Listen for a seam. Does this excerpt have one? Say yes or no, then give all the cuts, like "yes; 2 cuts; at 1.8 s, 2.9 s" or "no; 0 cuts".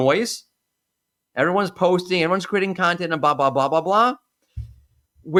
no; 0 cuts